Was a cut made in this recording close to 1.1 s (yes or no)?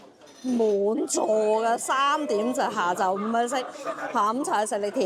no